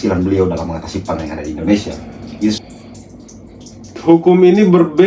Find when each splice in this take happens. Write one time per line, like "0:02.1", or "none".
0:02.6